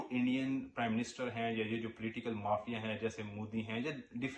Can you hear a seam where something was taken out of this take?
no; 0 cuts

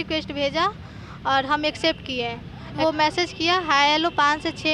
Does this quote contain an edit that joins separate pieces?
yes; 1 cut; at 2.8 s

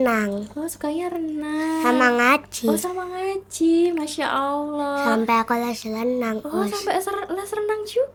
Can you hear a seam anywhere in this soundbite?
no; 0 cuts

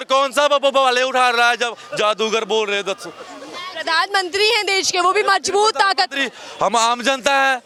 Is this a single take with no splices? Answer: yes; 0 cuts

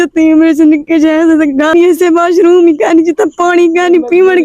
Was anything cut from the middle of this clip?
yes; 1 cut; at 1.7 s

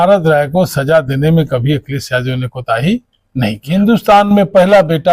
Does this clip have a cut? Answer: yes; 1 cut; at 3.7 s

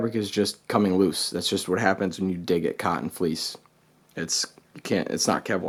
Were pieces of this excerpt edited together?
no; 0 cuts

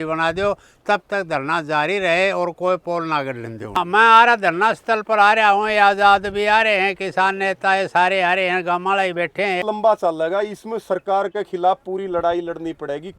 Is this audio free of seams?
no; 2 cuts; at 3.8 s, 9.6 s

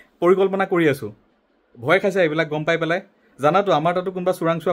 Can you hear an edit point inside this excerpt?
no; 0 cuts

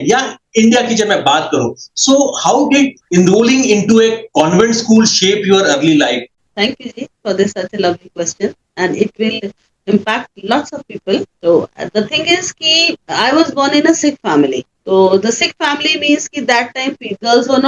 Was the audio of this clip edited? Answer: yes; 1 cut; at 6.4 s

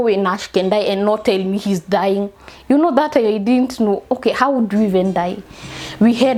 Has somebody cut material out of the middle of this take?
no; 0 cuts

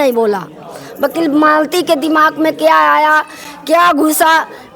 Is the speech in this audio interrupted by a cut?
no; 0 cuts

